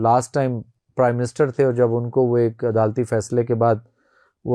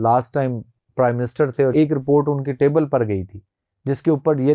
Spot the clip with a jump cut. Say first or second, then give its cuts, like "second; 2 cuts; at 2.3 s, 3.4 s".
second; 1 cut; at 1.7 s